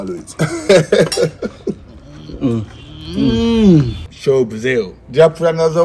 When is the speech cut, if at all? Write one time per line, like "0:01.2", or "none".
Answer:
0:04.0